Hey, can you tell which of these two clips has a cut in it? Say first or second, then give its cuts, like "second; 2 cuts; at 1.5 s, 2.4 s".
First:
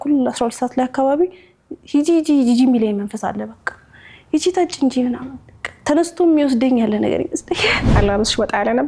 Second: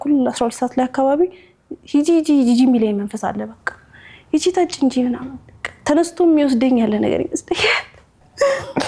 first; 1 cut; at 7.9 s